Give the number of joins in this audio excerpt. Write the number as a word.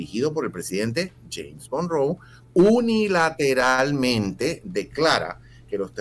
zero